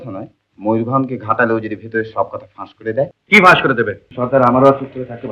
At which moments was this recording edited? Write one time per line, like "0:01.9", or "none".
0:03.2
0:04.0